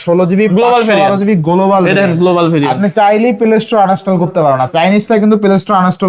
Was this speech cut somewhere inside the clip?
no; 0 cuts

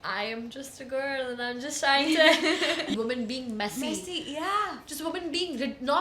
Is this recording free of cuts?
no; 1 cut; at 2.9 s

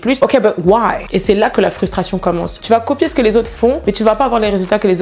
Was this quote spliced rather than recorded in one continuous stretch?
yes; 1 cut; at 1.0 s

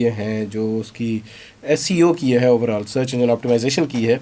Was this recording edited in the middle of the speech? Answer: no; 0 cuts

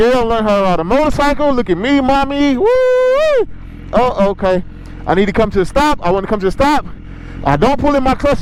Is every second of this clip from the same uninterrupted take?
yes; 0 cuts

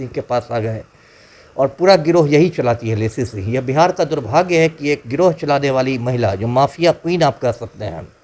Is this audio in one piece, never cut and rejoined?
yes; 0 cuts

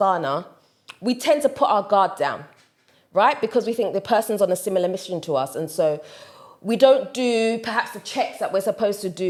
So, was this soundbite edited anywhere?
no; 0 cuts

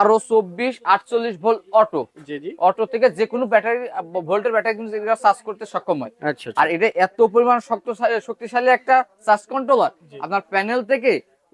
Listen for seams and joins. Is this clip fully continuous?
yes; 0 cuts

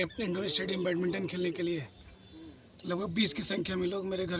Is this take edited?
no; 0 cuts

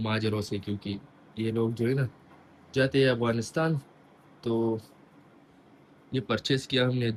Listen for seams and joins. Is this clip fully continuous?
yes; 0 cuts

